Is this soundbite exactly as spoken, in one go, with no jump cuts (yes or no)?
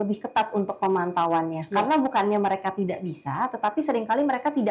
yes